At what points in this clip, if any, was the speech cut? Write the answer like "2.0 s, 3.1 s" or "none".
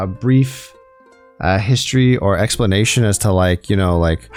none